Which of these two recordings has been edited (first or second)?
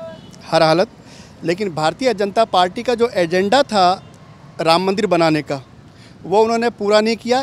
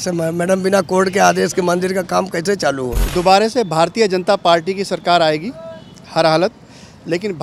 second